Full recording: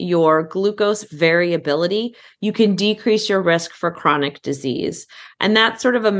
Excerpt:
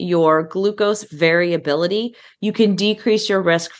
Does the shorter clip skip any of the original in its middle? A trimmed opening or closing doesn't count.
no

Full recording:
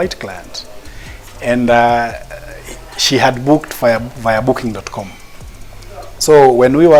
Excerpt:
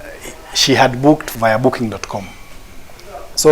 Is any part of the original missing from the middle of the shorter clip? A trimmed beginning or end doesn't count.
yes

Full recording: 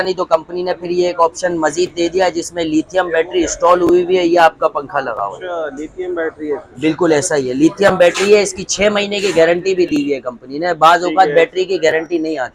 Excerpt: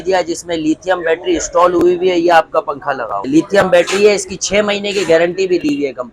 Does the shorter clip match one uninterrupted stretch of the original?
no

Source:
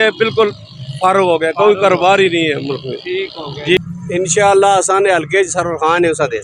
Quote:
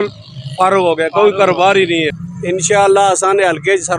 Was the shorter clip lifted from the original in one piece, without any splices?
no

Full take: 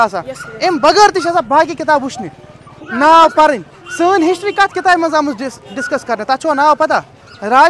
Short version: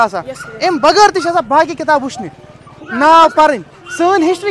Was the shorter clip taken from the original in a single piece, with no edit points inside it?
yes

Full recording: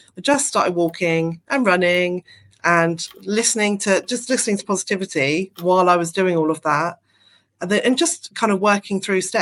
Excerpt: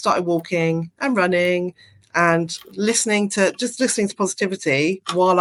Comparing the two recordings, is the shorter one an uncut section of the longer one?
yes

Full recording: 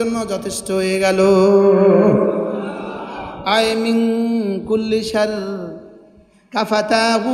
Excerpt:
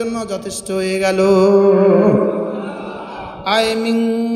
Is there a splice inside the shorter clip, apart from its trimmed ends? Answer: no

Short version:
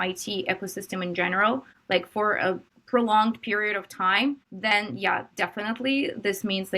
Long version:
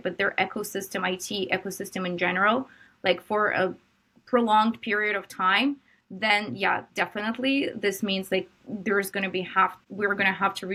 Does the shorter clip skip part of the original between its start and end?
yes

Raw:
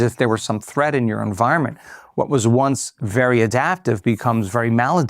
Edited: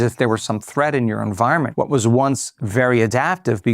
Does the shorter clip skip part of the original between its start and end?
yes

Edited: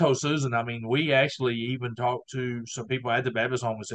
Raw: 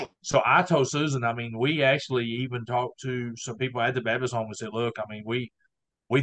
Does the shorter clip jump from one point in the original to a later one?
no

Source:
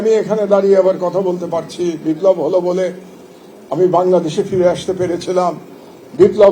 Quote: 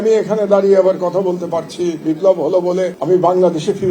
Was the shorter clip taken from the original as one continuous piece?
no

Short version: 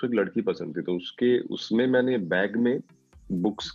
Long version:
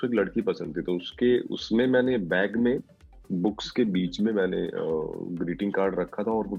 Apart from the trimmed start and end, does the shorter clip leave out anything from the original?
no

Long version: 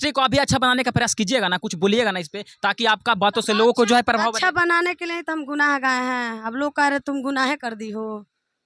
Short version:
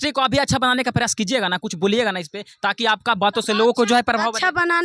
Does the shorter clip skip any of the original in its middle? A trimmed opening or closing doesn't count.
no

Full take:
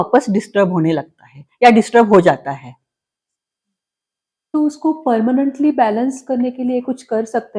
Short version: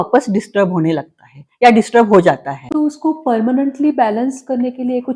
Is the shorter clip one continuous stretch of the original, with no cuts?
no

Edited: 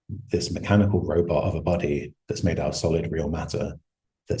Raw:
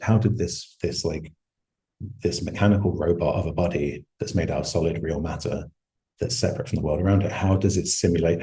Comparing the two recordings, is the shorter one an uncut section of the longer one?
yes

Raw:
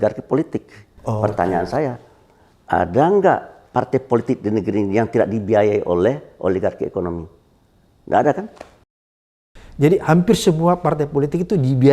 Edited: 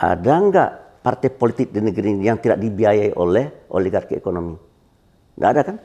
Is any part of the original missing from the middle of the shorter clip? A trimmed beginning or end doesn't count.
no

